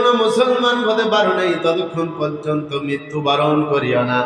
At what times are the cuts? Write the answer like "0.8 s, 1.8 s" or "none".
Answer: none